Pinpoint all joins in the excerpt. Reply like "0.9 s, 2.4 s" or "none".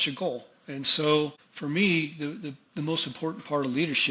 1.5 s